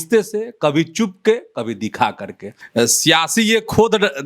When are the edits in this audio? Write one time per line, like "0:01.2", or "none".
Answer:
0:02.6